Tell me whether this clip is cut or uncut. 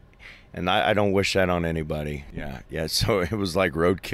cut